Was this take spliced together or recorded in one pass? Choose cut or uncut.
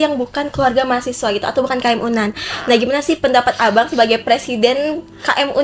uncut